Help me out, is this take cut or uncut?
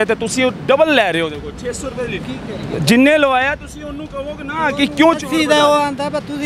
cut